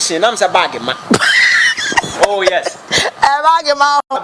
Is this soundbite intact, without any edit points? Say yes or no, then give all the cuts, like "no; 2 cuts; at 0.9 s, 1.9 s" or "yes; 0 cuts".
yes; 0 cuts